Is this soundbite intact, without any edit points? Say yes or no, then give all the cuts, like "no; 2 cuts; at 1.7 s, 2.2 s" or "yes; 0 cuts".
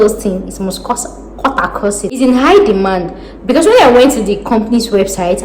no; 1 cut; at 2.2 s